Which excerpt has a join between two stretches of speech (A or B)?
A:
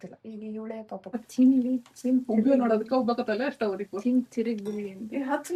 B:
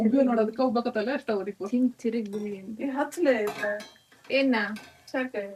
A